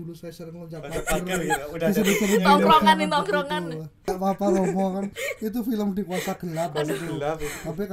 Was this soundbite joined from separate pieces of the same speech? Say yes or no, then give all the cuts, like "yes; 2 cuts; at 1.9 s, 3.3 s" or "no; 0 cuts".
yes; 1 cut; at 4.0 s